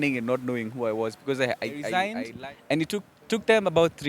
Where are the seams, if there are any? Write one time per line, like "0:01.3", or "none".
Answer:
0:02.0